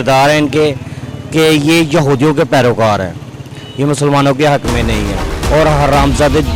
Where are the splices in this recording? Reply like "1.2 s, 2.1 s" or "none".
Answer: none